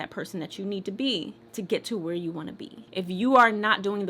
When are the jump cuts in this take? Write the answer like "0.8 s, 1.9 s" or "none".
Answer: 2.7 s